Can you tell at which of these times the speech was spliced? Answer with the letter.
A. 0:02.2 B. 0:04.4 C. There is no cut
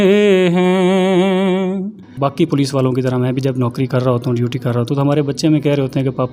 A